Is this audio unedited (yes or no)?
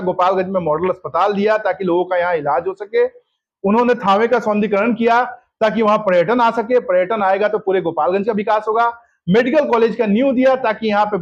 yes